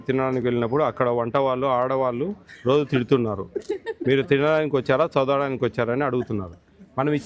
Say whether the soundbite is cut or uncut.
uncut